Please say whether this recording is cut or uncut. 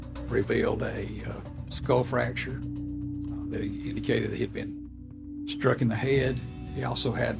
uncut